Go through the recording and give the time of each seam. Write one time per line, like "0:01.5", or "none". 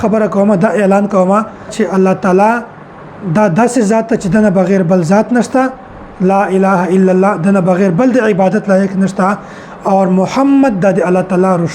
0:01.7